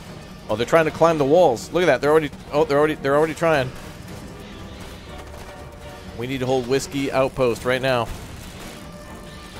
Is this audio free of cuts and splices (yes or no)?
yes